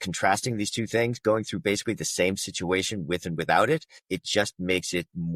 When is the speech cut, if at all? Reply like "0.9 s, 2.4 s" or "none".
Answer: 3.9 s